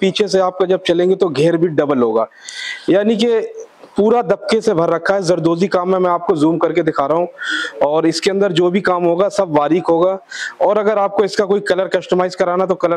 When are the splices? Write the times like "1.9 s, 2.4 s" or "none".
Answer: none